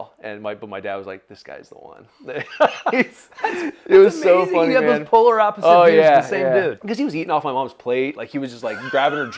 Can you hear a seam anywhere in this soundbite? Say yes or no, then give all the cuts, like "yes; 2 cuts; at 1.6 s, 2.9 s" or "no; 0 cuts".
yes; 1 cut; at 6.8 s